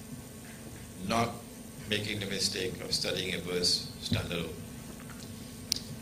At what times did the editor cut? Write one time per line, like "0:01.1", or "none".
none